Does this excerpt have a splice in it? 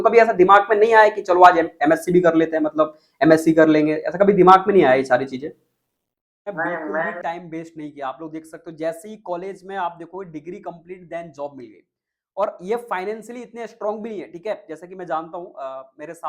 yes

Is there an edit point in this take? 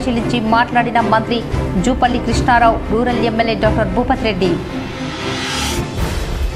no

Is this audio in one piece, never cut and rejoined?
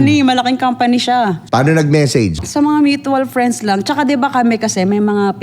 no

